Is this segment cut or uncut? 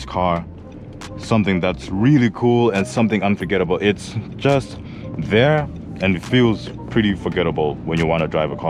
uncut